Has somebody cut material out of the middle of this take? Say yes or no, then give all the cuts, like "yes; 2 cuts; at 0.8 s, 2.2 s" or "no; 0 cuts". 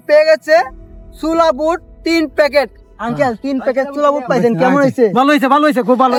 no; 0 cuts